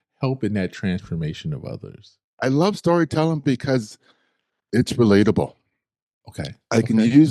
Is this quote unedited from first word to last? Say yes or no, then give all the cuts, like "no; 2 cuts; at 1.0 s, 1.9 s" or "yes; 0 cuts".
no; 1 cut; at 2.2 s